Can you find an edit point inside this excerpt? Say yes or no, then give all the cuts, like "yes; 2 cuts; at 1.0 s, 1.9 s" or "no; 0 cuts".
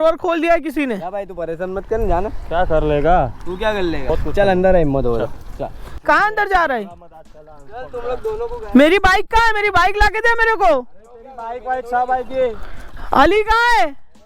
no; 0 cuts